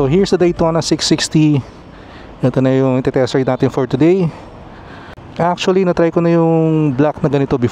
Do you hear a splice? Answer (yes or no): no